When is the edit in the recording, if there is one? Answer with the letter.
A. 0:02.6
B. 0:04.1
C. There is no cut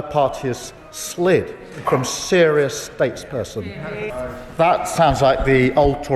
B